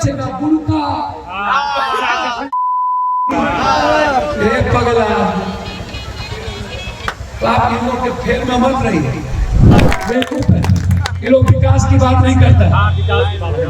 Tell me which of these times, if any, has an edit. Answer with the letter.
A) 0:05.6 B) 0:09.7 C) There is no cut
B